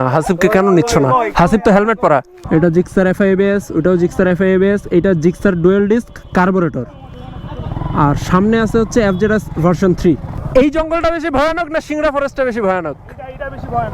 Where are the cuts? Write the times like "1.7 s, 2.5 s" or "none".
2.4 s, 10.3 s